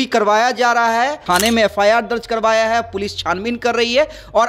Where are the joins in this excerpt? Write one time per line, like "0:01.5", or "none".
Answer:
0:01.2